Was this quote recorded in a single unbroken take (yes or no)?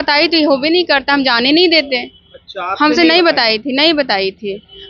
yes